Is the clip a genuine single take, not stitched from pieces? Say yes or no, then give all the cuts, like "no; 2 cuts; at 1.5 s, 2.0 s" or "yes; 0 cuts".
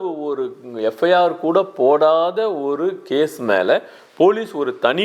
yes; 0 cuts